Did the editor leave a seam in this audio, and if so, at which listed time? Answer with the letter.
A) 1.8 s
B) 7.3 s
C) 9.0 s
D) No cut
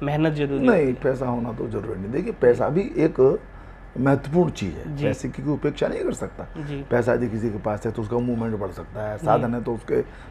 D